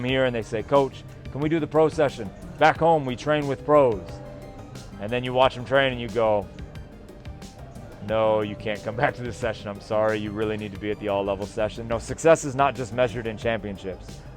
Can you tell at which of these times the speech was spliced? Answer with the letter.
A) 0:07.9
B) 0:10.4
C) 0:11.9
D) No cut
C